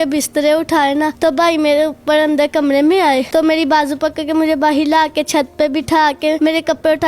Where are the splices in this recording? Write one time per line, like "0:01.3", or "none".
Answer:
0:01.1
0:03.3
0:06.4